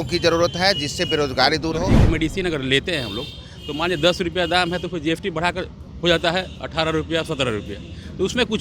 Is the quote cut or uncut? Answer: cut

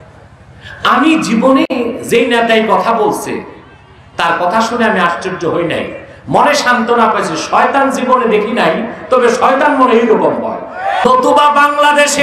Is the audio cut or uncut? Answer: cut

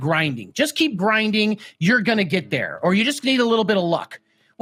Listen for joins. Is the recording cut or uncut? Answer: uncut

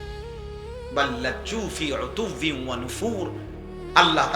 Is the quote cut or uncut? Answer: cut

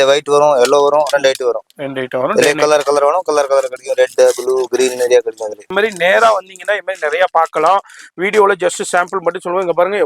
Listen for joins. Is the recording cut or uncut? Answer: cut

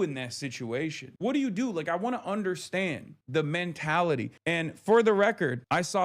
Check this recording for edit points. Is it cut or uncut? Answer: cut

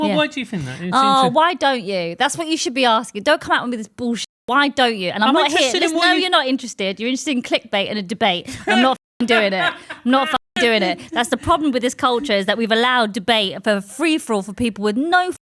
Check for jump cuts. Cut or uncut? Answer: uncut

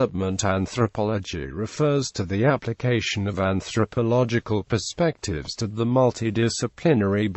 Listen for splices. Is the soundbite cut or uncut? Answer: cut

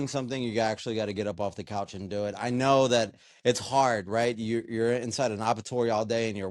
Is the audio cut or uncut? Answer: uncut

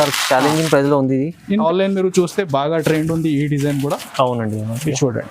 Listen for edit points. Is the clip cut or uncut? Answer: cut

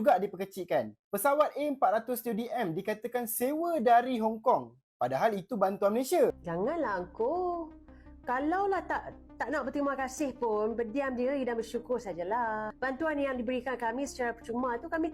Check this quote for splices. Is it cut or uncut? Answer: cut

